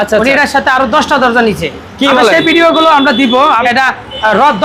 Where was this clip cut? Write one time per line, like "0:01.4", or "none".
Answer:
none